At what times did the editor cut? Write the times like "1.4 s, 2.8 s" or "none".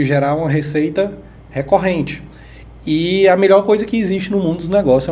none

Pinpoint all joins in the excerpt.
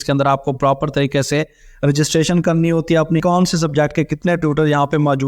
3.2 s

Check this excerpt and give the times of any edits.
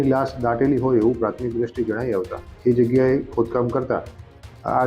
2.5 s

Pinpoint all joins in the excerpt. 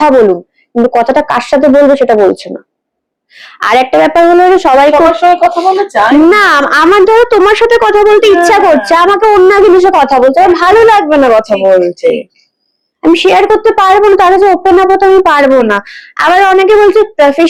none

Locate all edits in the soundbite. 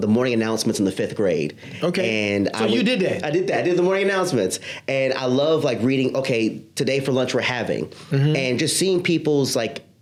none

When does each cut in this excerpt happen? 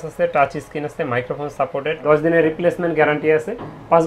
2.0 s

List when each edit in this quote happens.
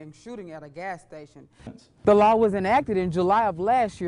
1.8 s

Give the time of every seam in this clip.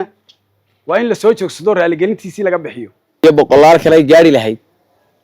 3.2 s

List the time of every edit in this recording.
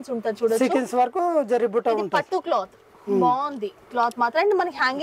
none

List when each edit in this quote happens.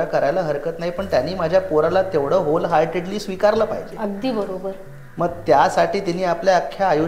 none

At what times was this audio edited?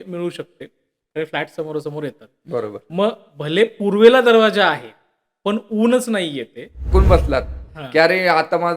6.9 s

